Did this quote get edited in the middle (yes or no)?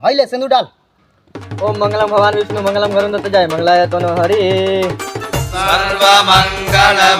no